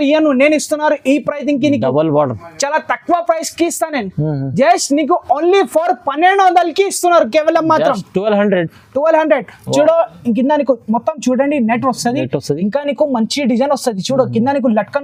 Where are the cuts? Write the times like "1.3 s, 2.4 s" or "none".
none